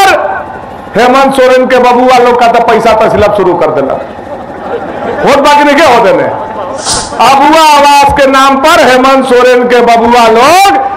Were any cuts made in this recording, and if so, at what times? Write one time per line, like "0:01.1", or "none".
0:06.9